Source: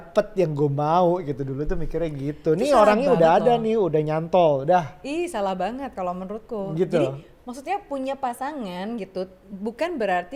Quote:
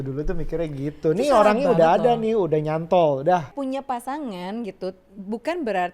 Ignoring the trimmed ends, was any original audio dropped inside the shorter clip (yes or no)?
yes